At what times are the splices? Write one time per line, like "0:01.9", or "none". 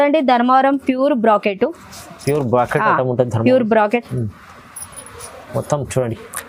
none